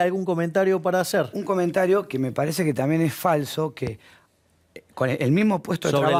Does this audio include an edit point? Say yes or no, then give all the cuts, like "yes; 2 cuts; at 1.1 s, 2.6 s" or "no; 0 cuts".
no; 0 cuts